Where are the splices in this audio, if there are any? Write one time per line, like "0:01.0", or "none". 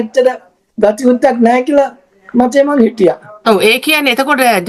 none

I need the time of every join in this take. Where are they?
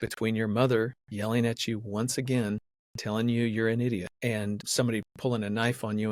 none

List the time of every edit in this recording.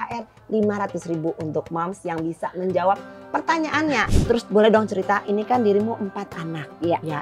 0:04.1

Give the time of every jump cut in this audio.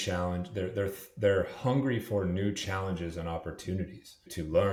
none

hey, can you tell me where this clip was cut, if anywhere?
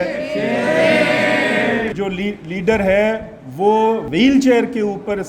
0:01.9
0:04.1

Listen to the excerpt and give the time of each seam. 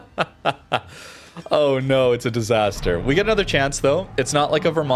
none

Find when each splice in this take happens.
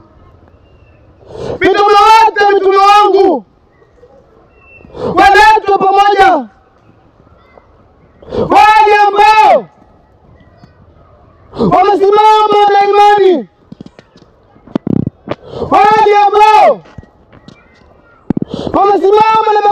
none

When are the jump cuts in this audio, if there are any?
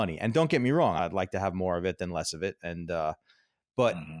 0:01.0

